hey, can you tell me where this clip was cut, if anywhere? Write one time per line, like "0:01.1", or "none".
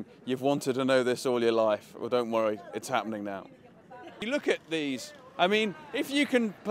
0:01.2